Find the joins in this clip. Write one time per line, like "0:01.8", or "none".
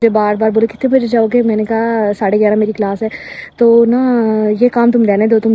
none

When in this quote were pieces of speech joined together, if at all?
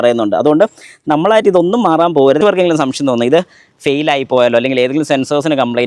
0:02.4

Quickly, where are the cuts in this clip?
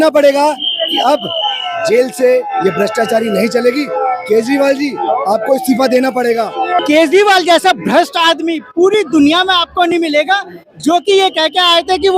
0:06.8

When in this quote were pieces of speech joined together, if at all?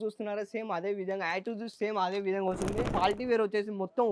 0:02.9

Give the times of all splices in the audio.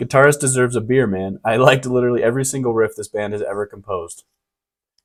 none

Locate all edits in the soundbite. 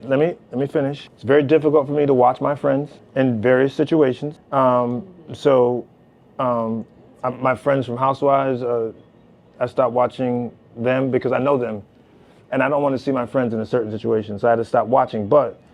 0:01.1
0:03.0
0:04.3

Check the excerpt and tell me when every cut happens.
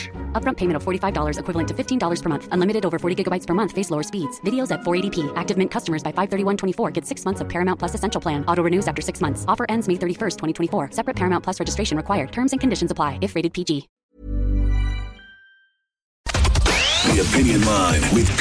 0:13.9
0:16.2

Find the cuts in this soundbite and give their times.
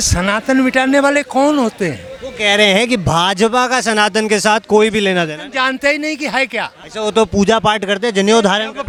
none

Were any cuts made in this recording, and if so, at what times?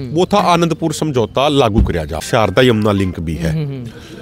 0:02.2

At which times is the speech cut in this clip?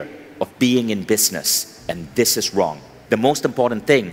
0:02.9

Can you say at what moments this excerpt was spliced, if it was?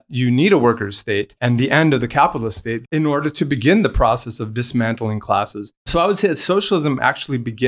0:01.3
0:02.9
0:05.9

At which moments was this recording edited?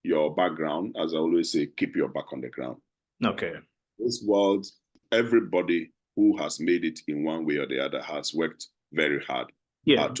0:05.0

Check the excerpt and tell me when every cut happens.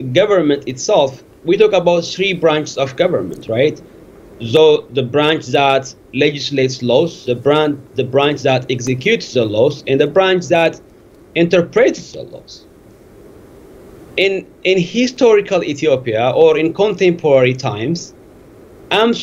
none

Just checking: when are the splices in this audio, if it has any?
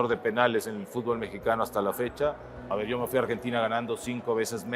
0:02.6

